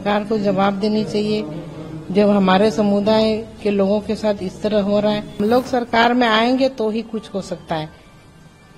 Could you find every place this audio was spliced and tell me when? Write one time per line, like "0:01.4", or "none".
0:05.4